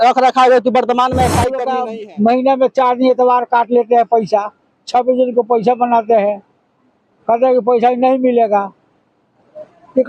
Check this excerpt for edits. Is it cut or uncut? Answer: cut